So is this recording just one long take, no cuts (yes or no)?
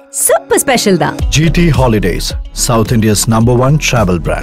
yes